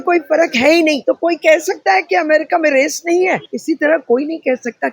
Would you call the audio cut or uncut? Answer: cut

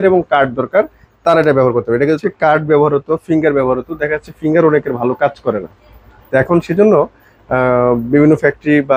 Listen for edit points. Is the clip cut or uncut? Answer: cut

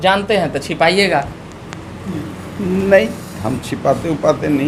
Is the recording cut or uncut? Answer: uncut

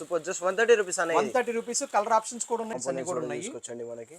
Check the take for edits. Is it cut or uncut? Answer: cut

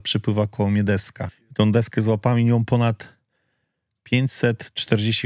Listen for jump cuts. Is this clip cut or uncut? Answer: cut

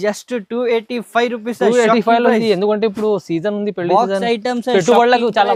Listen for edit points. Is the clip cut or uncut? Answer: uncut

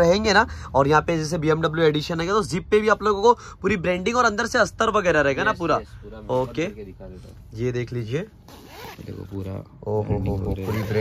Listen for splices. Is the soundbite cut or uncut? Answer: uncut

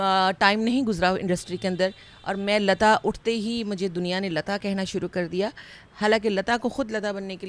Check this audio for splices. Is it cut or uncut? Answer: uncut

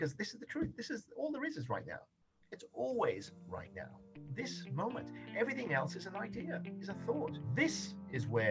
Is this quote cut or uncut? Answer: cut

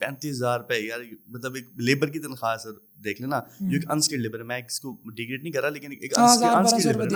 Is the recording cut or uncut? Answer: uncut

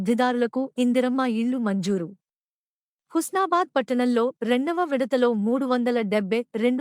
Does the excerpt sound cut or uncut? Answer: uncut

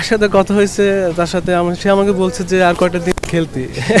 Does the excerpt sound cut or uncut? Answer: uncut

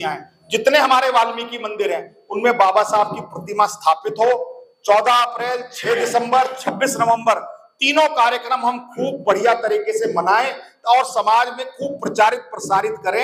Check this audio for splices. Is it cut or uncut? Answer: uncut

